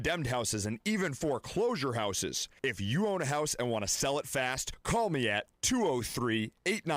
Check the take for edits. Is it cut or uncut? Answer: uncut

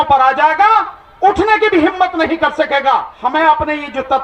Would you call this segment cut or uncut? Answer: cut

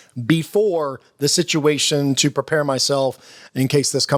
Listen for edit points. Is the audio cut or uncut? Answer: uncut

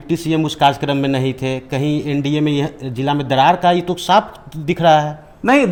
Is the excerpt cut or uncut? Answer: uncut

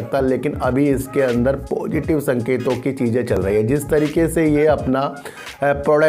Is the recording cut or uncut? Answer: uncut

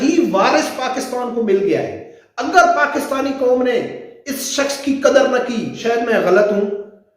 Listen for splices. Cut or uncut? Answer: cut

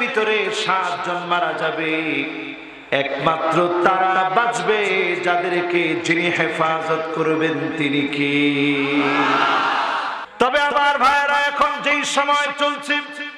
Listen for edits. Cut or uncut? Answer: cut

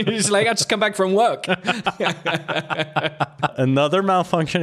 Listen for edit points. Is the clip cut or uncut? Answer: cut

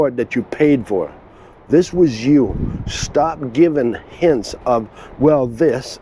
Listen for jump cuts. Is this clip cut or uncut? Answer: uncut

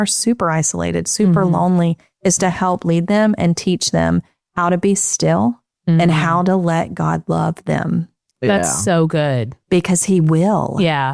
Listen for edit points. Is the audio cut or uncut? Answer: uncut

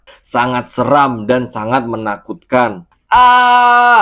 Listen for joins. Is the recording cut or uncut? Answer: cut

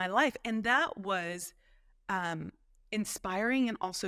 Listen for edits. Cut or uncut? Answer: uncut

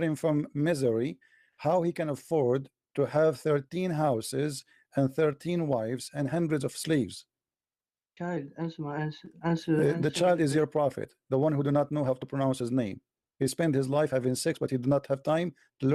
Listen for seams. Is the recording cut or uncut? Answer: uncut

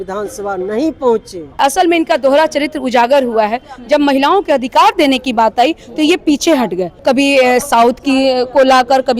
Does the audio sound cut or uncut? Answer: cut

